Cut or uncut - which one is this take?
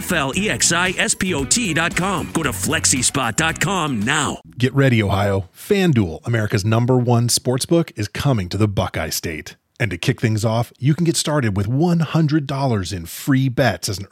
cut